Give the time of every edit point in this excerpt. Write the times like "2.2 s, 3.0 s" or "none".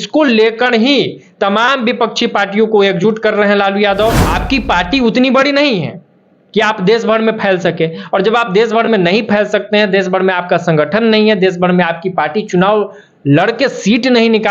4.2 s